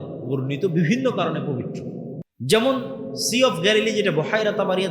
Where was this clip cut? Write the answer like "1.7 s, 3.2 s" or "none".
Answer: 2.2 s